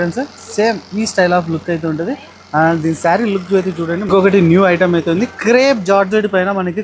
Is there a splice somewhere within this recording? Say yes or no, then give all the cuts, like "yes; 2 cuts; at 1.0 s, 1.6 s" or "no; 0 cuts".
yes; 1 cut; at 4.1 s